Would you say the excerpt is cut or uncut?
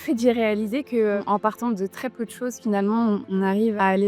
uncut